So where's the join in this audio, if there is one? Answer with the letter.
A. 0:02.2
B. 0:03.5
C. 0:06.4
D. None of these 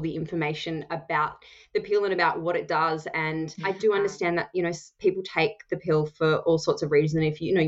B